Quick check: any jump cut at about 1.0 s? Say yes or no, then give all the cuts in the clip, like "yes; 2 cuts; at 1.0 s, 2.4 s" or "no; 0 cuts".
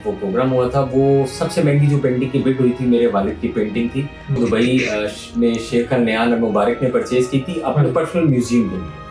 no; 1 cut; at 4.4 s